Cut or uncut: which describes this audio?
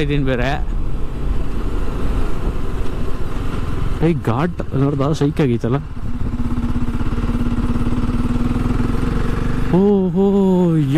uncut